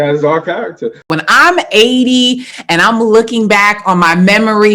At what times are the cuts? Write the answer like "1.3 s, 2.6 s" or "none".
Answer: 1.1 s